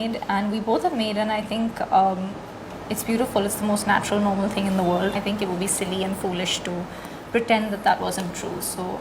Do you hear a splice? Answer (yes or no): yes